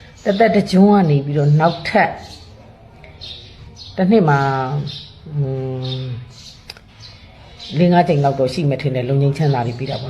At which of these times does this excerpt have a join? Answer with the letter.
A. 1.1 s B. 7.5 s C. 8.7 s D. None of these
C